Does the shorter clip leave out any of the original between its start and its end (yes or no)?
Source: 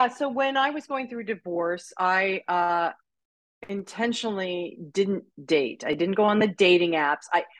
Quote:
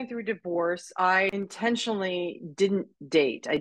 yes